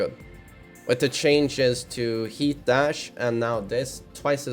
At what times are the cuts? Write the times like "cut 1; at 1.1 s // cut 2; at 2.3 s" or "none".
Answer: none